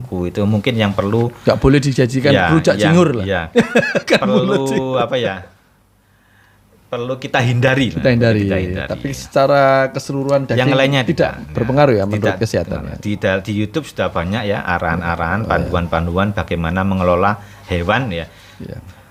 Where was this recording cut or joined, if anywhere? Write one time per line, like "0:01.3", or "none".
none